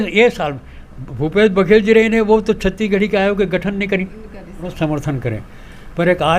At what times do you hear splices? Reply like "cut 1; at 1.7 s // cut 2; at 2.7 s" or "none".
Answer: cut 1; at 4.6 s